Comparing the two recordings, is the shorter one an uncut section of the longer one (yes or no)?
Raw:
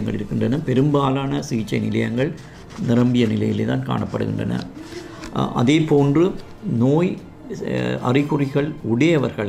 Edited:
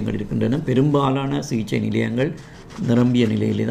yes